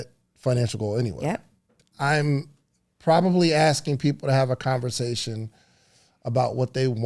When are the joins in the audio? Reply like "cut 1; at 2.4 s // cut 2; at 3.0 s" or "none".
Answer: cut 1; at 1.8 s